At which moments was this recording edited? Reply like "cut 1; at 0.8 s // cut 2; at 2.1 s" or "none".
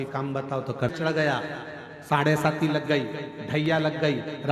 cut 1; at 0.9 s